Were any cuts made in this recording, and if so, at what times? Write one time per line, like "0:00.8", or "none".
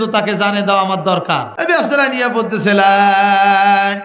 0:01.5